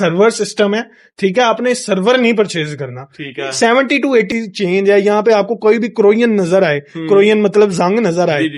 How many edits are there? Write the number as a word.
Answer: one